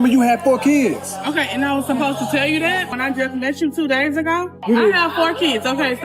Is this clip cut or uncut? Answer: cut